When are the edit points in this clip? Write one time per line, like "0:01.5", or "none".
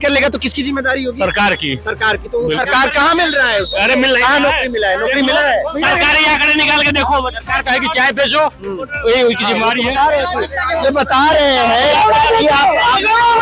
none